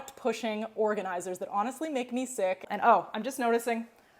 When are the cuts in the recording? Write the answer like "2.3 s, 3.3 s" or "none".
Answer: 2.6 s